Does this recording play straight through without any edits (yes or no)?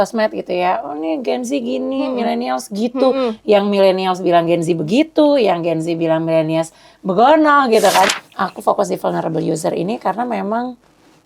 no